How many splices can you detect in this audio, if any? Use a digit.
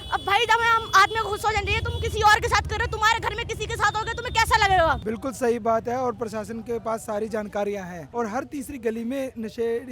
2